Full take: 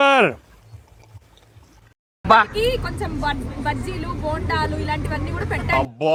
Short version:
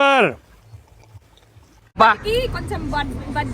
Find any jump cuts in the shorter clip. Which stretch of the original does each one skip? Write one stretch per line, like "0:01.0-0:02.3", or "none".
0:02.0-0:02.3